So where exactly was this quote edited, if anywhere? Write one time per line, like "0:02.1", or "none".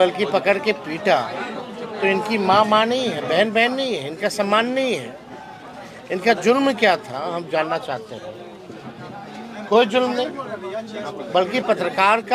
none